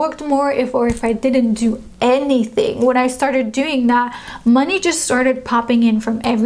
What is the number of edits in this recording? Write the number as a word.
zero